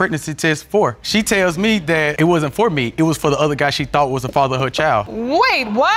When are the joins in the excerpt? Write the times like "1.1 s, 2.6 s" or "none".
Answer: none